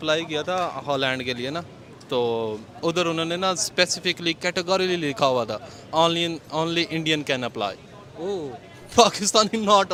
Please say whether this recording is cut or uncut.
uncut